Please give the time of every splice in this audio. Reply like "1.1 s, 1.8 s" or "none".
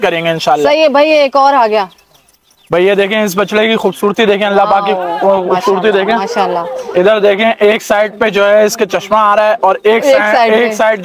none